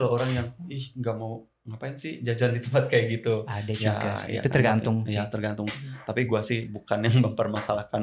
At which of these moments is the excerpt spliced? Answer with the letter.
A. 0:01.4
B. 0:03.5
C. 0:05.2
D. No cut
D